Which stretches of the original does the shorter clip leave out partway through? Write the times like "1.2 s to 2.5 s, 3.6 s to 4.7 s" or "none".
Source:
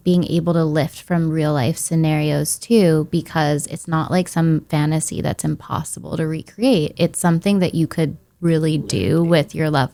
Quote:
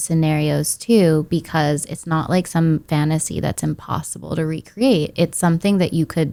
none

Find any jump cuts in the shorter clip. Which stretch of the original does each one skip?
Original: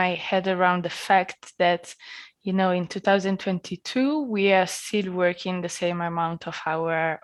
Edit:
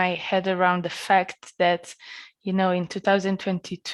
none

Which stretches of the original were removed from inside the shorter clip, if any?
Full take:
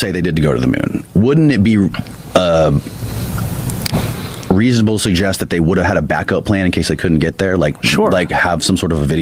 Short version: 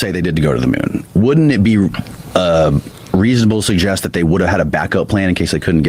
2.9 s to 4.3 s

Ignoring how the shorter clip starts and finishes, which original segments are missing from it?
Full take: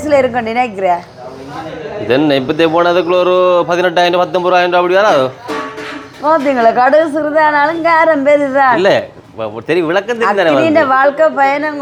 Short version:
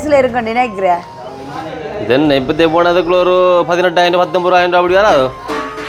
none

